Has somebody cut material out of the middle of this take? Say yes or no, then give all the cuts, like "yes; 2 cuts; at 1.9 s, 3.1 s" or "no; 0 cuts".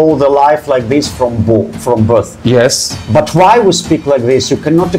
no; 0 cuts